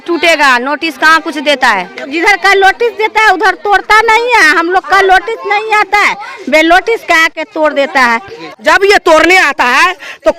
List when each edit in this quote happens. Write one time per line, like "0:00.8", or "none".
0:02.1
0:08.4